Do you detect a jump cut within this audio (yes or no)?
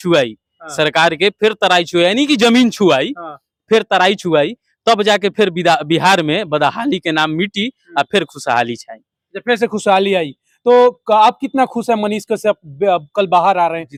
no